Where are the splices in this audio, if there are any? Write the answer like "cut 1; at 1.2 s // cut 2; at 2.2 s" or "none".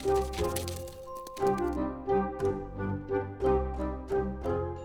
none